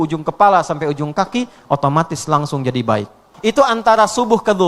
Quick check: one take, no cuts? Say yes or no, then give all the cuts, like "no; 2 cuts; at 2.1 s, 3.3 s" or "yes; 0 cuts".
no; 1 cut; at 3.3 s